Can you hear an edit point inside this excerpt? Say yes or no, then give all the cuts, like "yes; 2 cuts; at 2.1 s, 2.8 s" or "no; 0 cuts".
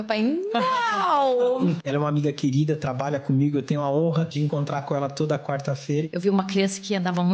yes; 3 cuts; at 1.8 s, 4.3 s, 6.0 s